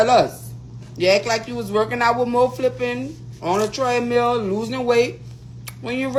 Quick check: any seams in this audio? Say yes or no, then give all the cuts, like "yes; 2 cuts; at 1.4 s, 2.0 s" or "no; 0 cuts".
no; 0 cuts